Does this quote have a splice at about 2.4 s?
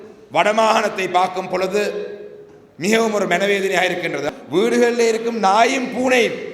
no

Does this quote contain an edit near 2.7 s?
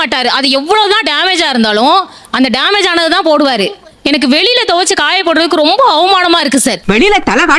no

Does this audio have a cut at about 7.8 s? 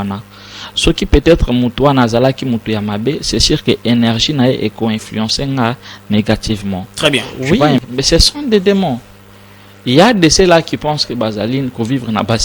yes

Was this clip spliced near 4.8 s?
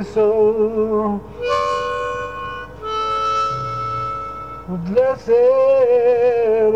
yes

